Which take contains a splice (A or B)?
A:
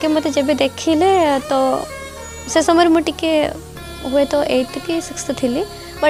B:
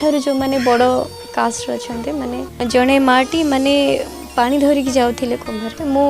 B